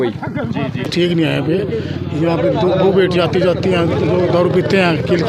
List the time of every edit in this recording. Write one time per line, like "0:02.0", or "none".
0:00.9